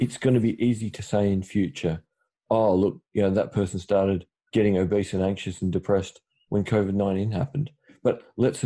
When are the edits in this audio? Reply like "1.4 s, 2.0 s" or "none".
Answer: 4.3 s, 6.4 s